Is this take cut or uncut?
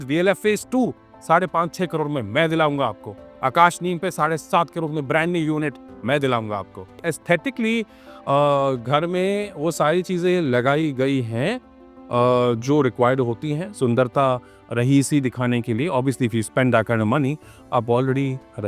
cut